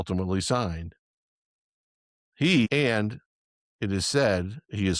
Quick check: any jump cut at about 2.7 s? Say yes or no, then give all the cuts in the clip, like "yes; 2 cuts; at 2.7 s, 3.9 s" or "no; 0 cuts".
yes; 1 cut; at 2.7 s